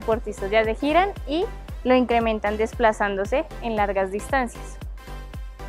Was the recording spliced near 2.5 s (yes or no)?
no